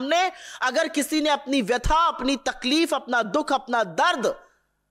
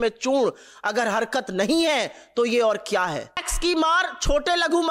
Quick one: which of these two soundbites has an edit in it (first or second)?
second